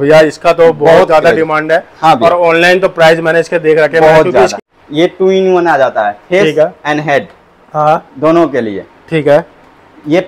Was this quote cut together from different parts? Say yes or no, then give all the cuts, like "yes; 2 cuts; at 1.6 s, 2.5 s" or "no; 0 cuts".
yes; 1 cut; at 4.6 s